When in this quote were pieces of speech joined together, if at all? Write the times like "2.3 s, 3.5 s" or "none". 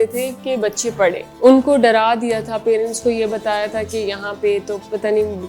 1.3 s